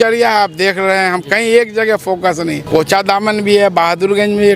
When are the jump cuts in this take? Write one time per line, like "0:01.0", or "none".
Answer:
0:02.6